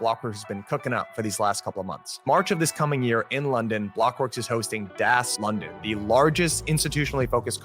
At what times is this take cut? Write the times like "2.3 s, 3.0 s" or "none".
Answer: 5.3 s